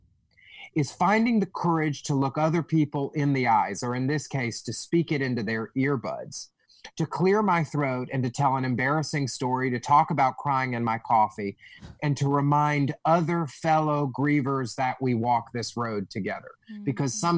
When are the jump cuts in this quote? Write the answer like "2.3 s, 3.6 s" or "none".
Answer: none

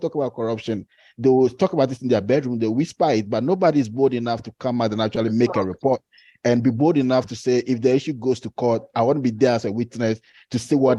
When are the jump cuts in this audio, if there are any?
none

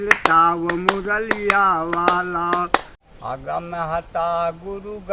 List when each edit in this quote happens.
3.0 s

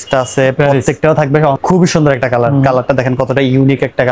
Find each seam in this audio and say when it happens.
1.6 s

